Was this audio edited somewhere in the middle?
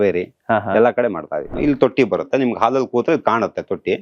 yes; 1 cut; at 1.5 s

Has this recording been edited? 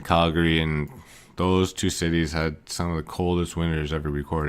yes; 1 cut; at 2.4 s

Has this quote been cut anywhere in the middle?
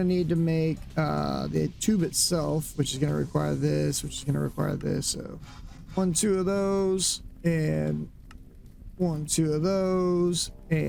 no; 0 cuts

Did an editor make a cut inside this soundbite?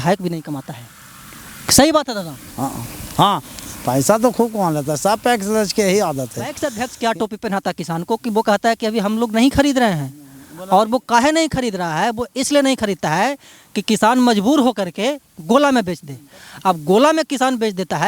yes; 1 cut; at 6.6 s

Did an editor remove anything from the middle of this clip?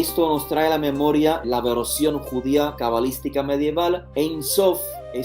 yes; 3 cuts; at 1.4 s, 2.8 s, 4.1 s

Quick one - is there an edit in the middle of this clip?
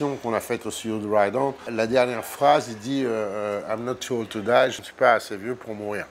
yes; 2 cuts; at 1.7 s, 4.8 s

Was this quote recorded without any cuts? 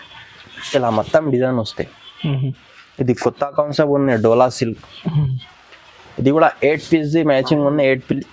yes; 0 cuts

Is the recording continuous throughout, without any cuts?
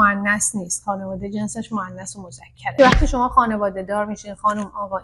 no; 1 cut; at 2.7 s

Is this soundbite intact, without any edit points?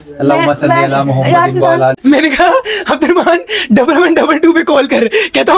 no; 1 cut; at 2.0 s

